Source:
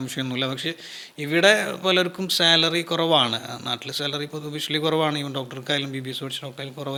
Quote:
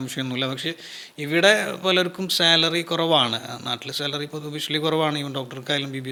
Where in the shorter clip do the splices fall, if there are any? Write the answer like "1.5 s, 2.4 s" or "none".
none